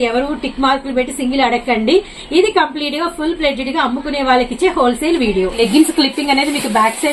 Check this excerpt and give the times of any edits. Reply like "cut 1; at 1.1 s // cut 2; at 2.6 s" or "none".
cut 1; at 5.5 s